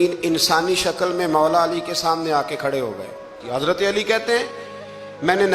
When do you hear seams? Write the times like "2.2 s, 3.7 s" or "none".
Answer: 3.4 s